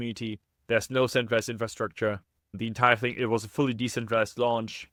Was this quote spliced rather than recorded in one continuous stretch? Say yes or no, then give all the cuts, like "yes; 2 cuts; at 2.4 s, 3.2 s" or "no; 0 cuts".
no; 0 cuts